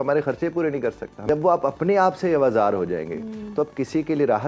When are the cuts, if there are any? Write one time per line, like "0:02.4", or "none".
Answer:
0:01.1